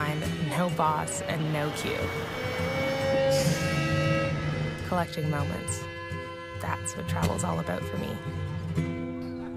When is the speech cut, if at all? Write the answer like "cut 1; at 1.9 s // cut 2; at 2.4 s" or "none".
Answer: cut 1; at 5.7 s